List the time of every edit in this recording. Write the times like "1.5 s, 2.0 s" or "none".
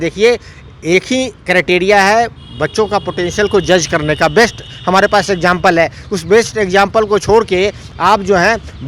none